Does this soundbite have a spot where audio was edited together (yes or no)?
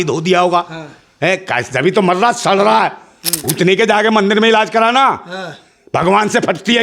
yes